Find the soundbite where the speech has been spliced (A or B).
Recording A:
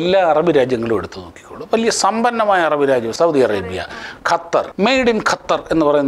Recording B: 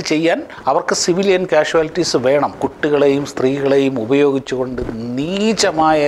A